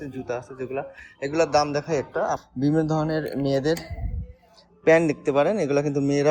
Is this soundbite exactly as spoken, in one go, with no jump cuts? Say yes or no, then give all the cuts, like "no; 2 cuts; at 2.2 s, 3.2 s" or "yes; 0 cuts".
no; 1 cut; at 2.4 s